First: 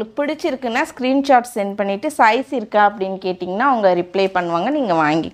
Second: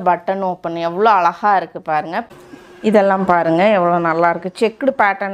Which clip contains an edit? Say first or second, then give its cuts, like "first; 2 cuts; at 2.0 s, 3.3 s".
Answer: second; 1 cut; at 2.3 s